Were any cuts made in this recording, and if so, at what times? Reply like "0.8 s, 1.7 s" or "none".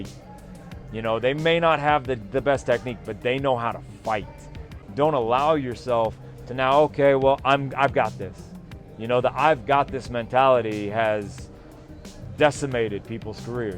4.7 s